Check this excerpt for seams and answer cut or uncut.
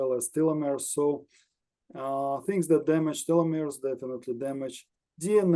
uncut